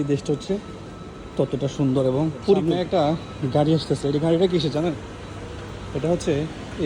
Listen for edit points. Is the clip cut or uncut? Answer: cut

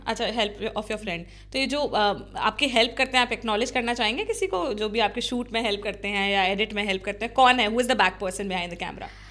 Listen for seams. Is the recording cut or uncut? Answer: uncut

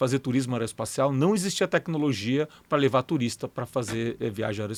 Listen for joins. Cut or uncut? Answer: uncut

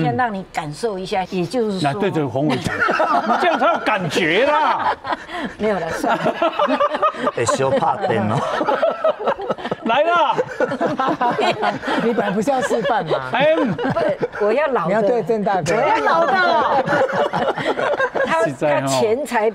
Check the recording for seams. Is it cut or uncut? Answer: cut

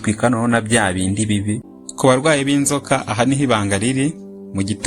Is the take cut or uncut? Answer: cut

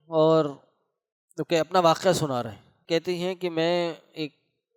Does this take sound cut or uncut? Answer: cut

